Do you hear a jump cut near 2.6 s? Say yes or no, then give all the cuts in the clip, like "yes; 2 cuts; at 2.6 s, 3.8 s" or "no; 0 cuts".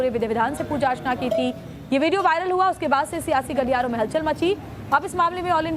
yes; 1 cut; at 2.6 s